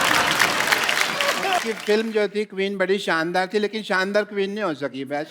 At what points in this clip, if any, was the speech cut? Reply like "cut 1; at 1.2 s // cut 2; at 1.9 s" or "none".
cut 1; at 1.6 s